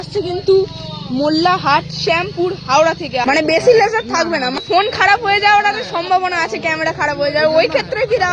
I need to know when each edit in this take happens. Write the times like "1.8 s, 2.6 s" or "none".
3.2 s, 4.6 s